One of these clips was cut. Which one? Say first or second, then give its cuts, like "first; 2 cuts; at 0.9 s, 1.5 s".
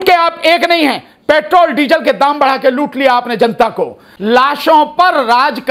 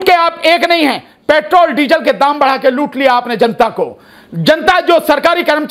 first; 1 cut; at 4.1 s